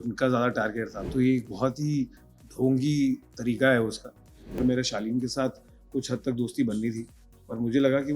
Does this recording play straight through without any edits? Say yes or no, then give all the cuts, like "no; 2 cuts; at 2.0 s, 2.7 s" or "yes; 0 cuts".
no; 2 cuts; at 1.0 s, 4.6 s